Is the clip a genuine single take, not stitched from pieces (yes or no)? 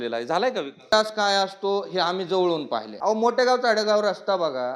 no